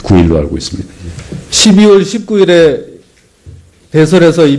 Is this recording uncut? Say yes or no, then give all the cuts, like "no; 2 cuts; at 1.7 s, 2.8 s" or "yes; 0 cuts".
no; 1 cut; at 1.5 s